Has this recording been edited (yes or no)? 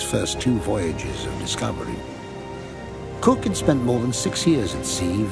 no